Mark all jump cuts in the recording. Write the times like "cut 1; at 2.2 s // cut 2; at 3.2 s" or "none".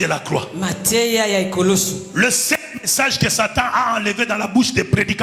none